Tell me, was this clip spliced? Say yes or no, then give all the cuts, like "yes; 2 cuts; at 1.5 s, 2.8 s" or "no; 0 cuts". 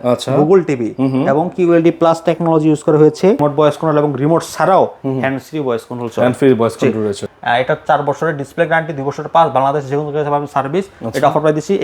yes; 2 cuts; at 3.4 s, 7.2 s